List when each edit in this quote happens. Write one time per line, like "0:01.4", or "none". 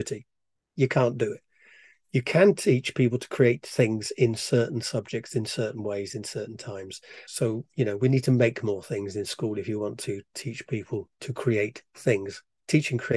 0:07.0